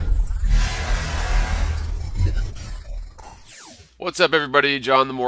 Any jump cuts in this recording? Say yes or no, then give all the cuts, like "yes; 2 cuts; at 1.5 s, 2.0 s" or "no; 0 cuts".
no; 0 cuts